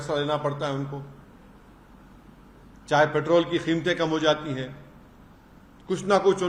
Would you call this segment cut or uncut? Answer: uncut